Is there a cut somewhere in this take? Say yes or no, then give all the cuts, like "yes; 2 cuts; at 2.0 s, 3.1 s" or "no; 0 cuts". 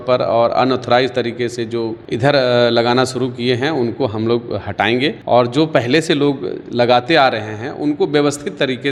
no; 0 cuts